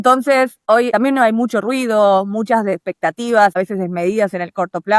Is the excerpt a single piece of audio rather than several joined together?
no; 1 cut; at 3.6 s

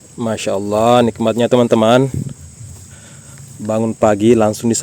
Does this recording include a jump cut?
no; 0 cuts

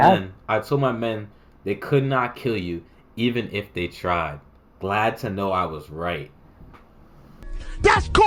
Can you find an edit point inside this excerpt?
no; 0 cuts

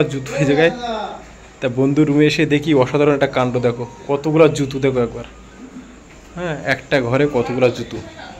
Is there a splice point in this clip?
no; 0 cuts

